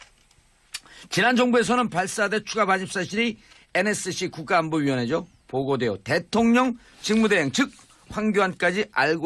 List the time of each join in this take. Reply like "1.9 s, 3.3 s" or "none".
3.3 s